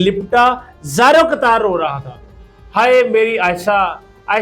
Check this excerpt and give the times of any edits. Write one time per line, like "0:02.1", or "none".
none